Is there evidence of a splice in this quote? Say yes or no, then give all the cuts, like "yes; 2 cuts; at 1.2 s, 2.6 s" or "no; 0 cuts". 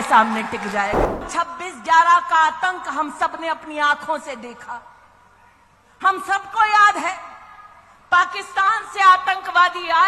yes; 1 cut; at 1.3 s